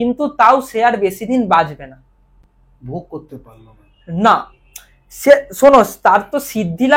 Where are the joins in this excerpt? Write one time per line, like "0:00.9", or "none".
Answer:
none